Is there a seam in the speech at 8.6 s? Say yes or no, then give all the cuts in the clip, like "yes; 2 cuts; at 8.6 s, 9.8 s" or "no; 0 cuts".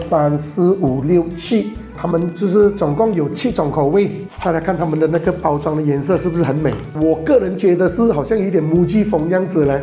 no; 2 cuts; at 4.3 s, 7.0 s